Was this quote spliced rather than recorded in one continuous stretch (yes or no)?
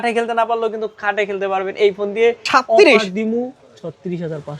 yes